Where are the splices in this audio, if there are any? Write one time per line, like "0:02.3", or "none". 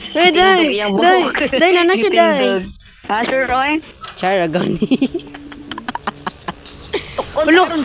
none